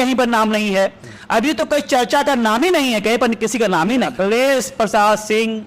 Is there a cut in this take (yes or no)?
yes